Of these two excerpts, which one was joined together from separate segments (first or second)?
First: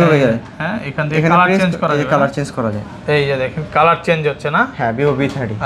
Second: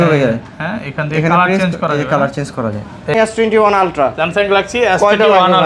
second